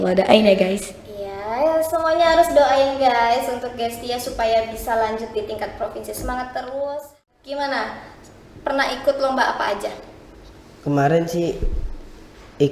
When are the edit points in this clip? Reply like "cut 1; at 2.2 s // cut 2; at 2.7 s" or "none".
cut 1; at 7.2 s